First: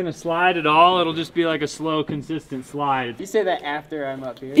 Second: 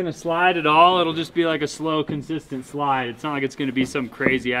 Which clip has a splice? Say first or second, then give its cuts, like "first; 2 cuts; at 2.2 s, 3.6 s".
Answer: first; 1 cut; at 3.2 s